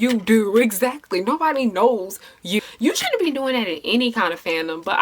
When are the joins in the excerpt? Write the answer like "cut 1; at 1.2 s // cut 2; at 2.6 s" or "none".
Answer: cut 1; at 2.6 s